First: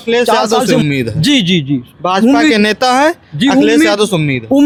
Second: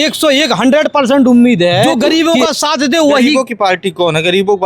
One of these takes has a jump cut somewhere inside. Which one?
second; 1 cut; at 1.9 s

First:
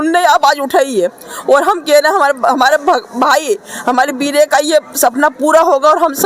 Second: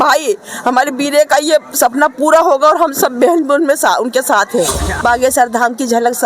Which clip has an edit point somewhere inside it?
second; 1 cut; at 4.9 s

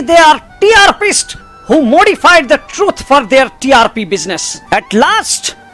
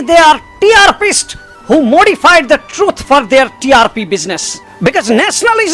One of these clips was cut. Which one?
first; 1 cut; at 4.6 s

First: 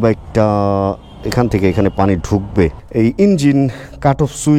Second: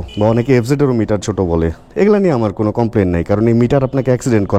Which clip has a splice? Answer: first; 1 cut; at 2.8 s

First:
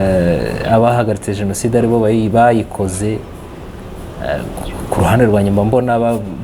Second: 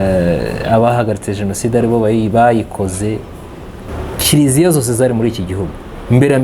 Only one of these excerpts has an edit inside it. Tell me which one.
second; 1 cut; at 3.9 s

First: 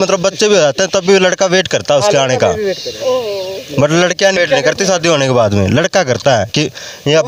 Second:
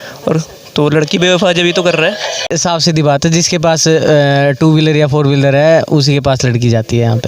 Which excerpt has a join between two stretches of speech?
second; 1 cut; at 2.5 s

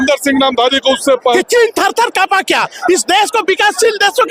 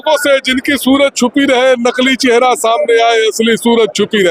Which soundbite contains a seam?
first; 1 cut; at 1.3 s

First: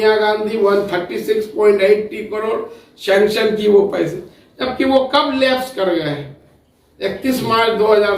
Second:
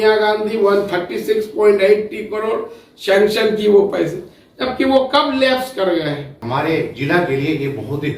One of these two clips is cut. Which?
second; 1 cut; at 6.4 s

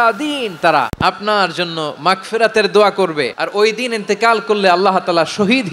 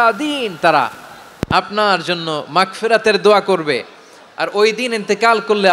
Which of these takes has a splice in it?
first; 2 cuts; at 0.9 s, 3.4 s

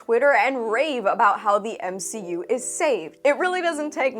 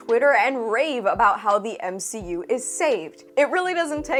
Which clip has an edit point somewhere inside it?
first; 1 cut; at 3.1 s

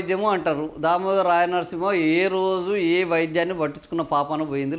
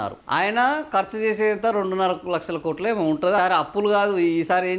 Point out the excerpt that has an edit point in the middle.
second; 1 cut; at 3.4 s

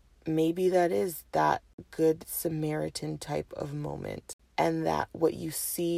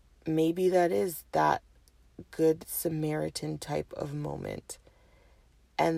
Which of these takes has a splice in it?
first; 2 cuts; at 1.8 s, 4.3 s

